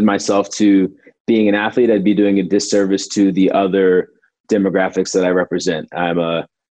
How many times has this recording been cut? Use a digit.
1